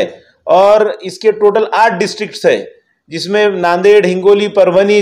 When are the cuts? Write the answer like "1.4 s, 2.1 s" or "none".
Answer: none